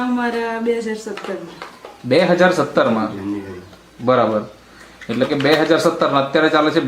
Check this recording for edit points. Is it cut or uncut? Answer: uncut